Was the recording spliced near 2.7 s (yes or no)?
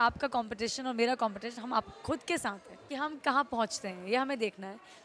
no